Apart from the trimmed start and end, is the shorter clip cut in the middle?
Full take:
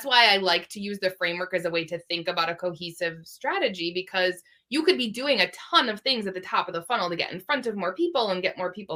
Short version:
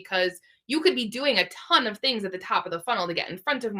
no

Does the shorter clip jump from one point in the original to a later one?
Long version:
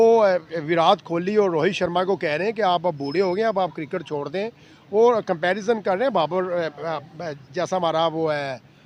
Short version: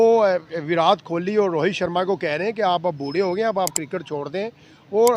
no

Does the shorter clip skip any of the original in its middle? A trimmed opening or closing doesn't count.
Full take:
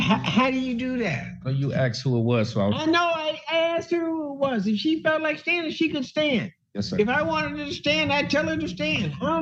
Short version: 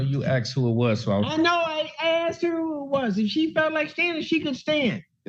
no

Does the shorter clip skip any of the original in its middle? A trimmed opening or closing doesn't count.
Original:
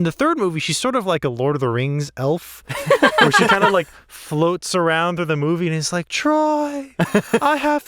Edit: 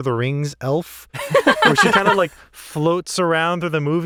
no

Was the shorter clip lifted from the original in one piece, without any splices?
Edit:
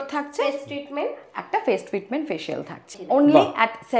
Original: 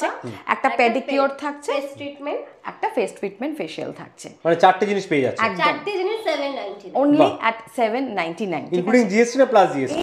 no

